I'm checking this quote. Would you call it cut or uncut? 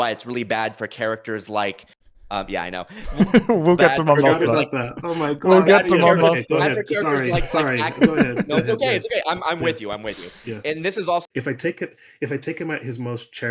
cut